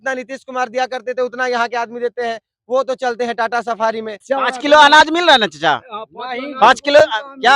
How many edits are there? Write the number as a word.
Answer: one